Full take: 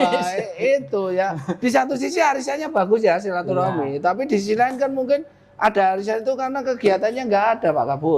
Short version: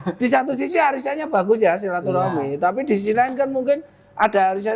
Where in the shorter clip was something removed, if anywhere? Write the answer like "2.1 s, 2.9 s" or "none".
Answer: none